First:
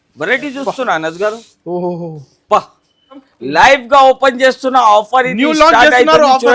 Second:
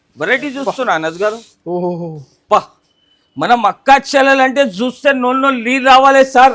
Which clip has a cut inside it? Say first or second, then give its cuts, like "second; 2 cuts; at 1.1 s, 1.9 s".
first; 1 cut; at 3.3 s